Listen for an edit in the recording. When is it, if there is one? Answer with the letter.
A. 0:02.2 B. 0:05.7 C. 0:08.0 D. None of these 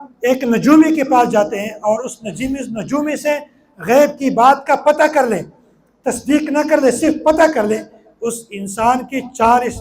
D